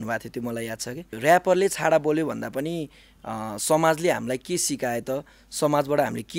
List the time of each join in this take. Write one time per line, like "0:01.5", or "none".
0:01.2